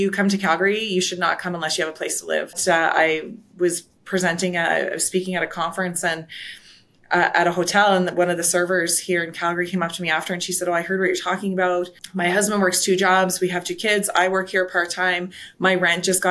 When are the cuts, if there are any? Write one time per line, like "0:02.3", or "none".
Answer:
0:02.6
0:12.0